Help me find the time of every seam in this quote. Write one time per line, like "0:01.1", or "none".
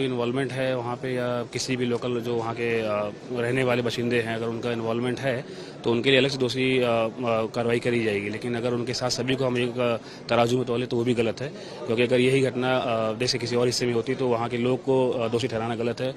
none